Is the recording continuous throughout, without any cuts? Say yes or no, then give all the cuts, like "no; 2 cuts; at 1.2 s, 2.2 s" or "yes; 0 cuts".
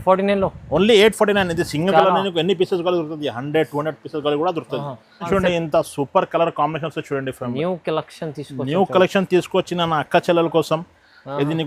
no; 1 cut; at 5.3 s